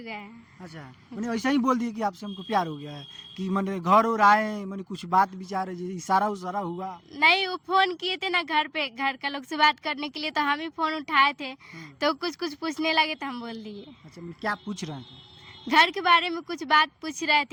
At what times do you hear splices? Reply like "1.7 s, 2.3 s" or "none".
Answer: none